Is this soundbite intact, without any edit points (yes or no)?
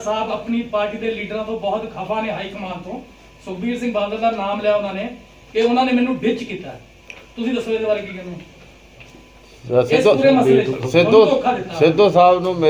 yes